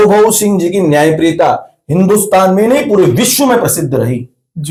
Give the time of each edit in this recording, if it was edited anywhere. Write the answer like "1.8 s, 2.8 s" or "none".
none